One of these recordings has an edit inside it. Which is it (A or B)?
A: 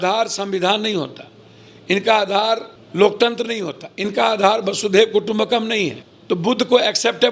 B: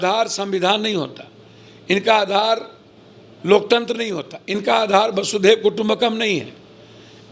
A